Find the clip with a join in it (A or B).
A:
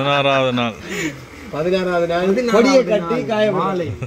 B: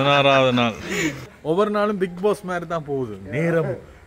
B